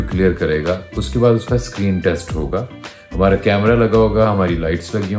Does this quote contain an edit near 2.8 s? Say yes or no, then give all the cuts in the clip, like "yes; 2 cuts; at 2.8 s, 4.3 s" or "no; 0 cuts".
no; 0 cuts